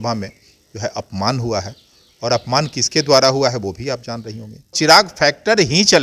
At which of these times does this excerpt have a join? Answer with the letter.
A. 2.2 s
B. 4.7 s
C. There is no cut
B